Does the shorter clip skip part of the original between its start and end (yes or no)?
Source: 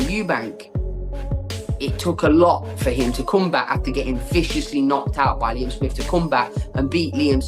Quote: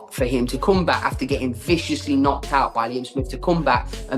no